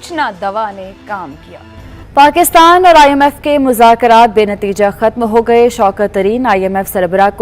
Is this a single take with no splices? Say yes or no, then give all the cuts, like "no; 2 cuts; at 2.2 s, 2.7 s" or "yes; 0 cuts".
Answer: no; 1 cut; at 1.9 s